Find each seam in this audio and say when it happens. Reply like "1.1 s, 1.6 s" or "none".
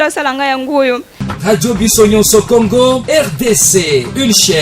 1.1 s